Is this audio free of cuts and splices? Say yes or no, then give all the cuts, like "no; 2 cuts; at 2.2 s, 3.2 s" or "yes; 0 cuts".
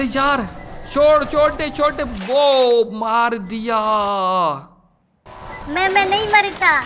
no; 1 cut; at 4.7 s